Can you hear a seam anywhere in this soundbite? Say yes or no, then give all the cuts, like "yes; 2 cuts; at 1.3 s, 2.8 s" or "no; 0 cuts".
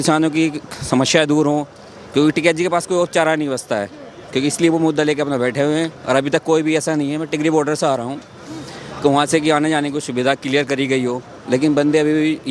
no; 0 cuts